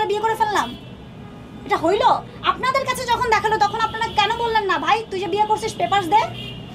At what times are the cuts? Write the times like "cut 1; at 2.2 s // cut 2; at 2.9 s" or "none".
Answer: none

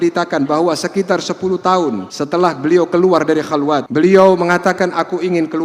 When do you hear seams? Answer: cut 1; at 2.1 s // cut 2; at 3.9 s

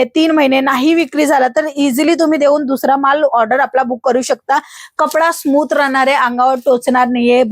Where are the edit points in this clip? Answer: cut 1; at 4.8 s

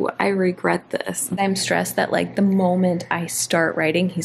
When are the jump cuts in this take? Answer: cut 1; at 1.4 s

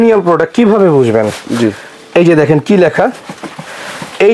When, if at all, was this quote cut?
none

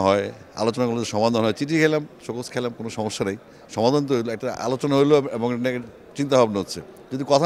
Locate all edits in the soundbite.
none

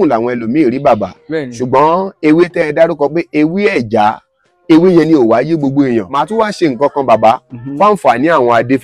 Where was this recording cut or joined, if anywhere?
cut 1; at 6.1 s

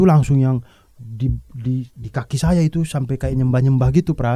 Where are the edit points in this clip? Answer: none

